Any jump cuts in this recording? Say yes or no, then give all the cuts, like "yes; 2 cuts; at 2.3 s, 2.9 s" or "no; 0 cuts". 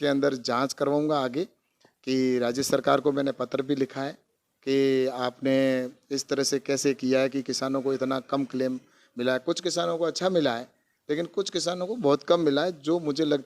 no; 0 cuts